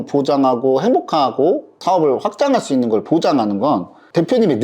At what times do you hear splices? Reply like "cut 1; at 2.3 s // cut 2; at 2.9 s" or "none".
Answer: cut 1; at 1.8 s